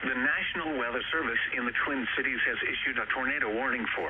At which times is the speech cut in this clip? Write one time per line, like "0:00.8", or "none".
0:02.3